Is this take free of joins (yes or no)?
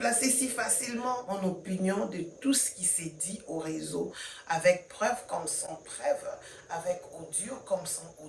no